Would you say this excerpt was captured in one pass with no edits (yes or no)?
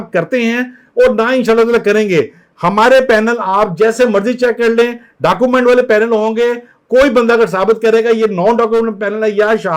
yes